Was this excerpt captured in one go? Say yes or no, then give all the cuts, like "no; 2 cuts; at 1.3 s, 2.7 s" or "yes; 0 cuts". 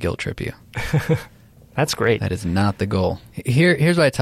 yes; 0 cuts